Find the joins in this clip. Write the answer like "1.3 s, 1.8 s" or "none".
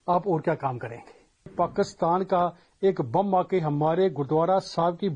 1.5 s